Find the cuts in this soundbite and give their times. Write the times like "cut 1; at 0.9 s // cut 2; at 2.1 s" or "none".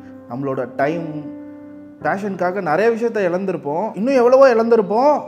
none